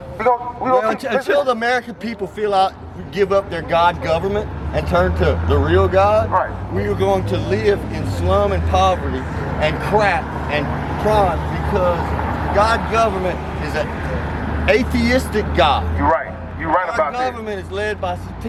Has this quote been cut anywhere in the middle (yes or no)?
no